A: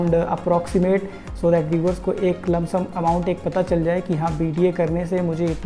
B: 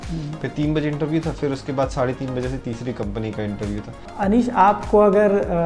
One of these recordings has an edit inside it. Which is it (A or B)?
B